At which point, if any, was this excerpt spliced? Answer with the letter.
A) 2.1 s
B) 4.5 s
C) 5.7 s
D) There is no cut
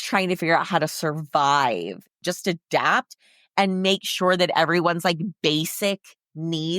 A